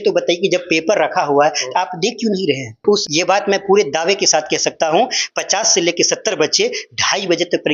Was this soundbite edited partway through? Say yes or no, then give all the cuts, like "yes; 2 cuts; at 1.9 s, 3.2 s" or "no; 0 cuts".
yes; 1 cut; at 2.8 s